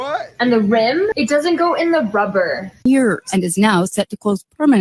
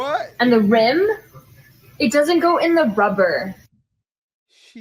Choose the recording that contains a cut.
first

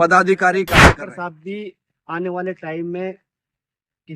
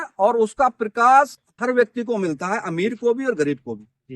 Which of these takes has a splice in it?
first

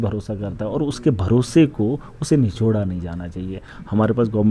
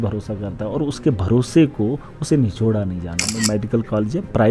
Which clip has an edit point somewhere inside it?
second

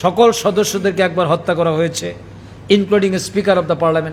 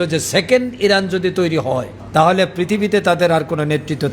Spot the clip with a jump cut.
second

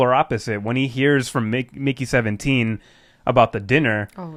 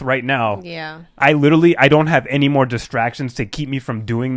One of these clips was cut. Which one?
second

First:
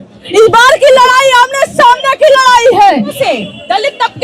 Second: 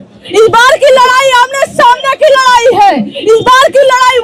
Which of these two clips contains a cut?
first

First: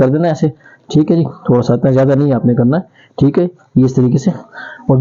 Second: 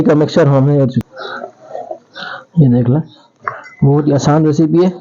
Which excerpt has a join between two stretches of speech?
second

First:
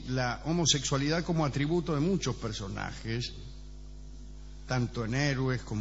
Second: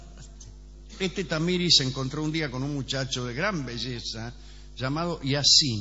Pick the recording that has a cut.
first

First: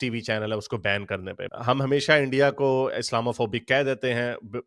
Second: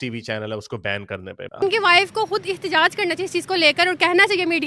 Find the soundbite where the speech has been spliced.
second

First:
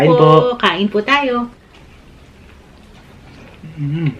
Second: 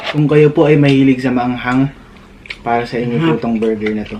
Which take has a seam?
first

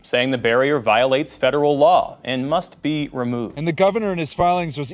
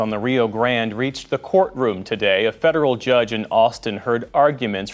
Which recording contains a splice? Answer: first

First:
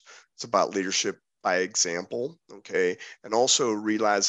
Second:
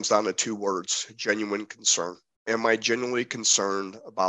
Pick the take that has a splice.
second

